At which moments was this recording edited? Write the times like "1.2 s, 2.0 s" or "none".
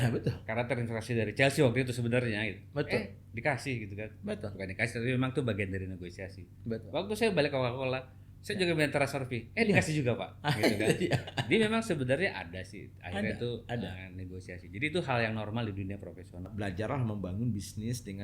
16.5 s